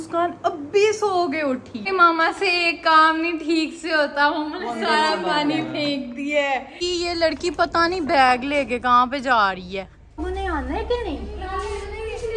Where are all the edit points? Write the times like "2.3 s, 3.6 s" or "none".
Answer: 1.9 s, 6.7 s, 10.2 s